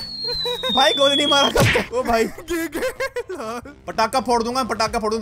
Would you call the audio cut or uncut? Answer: cut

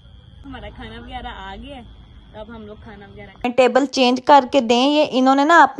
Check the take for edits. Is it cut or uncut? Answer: cut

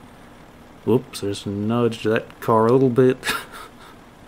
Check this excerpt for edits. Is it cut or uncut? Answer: uncut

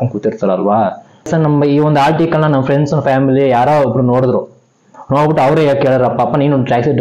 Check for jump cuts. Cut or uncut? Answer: cut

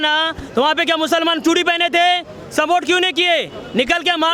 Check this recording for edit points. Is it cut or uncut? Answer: uncut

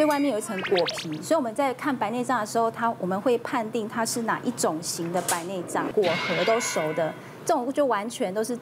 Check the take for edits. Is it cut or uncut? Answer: cut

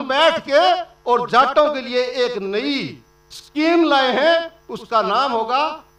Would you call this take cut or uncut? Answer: uncut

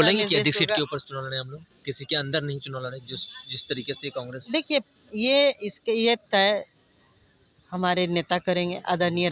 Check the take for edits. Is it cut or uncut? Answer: uncut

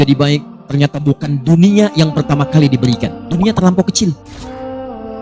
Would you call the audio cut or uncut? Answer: cut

